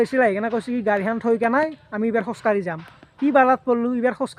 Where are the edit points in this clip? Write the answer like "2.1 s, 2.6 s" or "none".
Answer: none

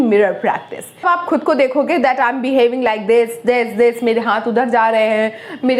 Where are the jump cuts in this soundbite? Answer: 1.0 s

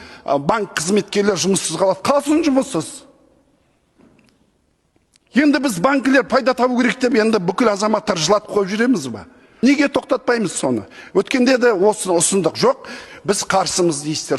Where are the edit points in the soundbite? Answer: 9.4 s

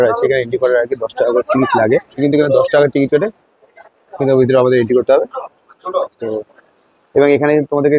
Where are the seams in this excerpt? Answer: none

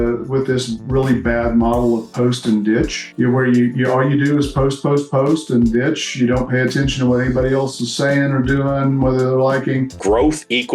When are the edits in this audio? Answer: 3.0 s, 10.0 s

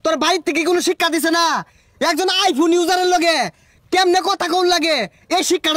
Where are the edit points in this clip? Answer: none

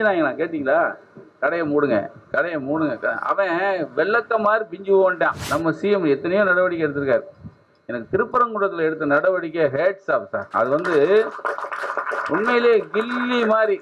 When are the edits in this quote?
5.4 s

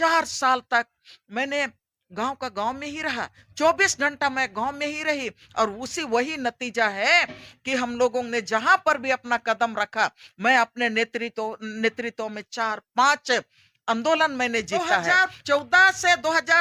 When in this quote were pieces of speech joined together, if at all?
15.1 s

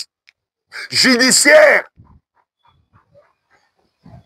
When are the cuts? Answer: none

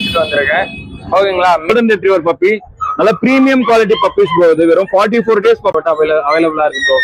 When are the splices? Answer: 1.7 s, 5.8 s

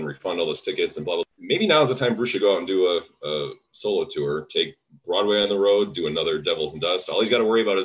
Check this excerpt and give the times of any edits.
1.2 s

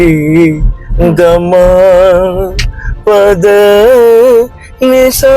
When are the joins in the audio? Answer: none

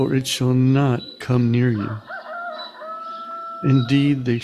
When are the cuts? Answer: 2.0 s, 3.5 s

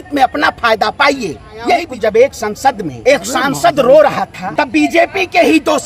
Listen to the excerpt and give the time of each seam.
1.9 s, 2.9 s, 4.4 s

